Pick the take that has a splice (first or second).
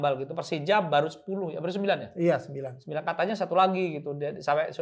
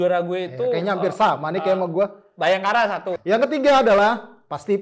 second